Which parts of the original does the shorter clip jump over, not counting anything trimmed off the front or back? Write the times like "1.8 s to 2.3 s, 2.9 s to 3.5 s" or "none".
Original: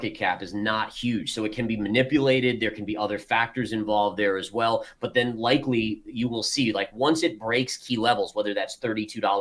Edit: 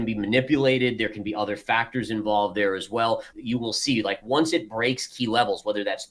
5.0 s to 6.0 s